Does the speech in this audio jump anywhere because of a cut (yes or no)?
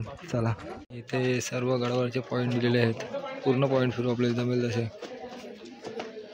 no